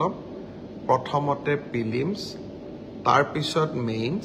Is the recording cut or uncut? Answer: uncut